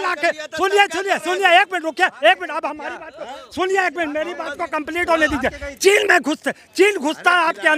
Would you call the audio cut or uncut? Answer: uncut